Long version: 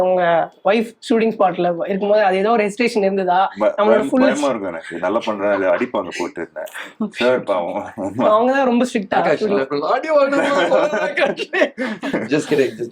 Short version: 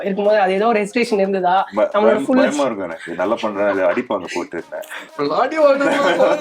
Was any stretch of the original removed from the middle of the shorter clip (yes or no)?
yes